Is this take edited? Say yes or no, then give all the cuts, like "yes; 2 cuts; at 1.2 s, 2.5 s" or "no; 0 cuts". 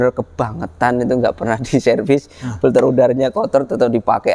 no; 0 cuts